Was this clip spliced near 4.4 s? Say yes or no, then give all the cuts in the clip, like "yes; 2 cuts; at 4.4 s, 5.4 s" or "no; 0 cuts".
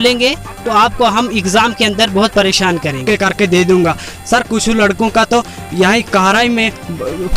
no; 1 cut; at 3.0 s